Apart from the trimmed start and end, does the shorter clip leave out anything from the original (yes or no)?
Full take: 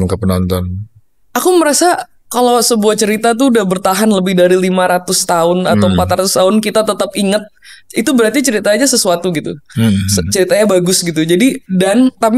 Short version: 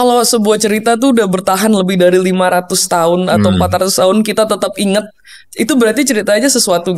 no